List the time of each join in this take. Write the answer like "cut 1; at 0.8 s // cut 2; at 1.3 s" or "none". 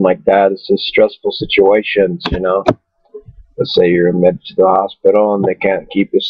cut 1; at 1.4 s